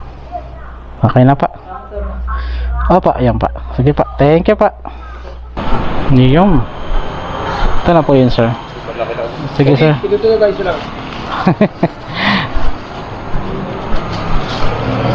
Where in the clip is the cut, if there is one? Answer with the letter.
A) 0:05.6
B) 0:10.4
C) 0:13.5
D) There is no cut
A